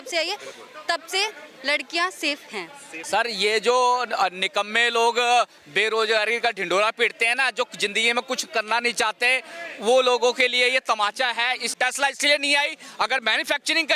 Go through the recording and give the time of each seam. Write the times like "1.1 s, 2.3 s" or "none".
2.9 s, 11.7 s